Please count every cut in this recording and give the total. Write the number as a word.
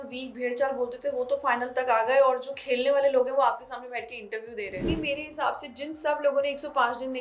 one